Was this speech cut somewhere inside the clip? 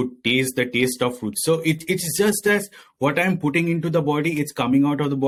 no; 0 cuts

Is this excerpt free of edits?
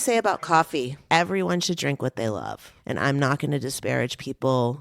no; 2 cuts; at 1.0 s, 2.7 s

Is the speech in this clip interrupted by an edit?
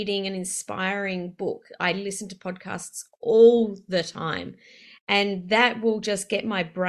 no; 0 cuts

